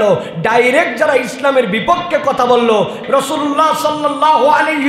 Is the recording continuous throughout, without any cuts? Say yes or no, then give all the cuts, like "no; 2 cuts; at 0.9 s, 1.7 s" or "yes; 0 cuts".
no; 1 cut; at 3.0 s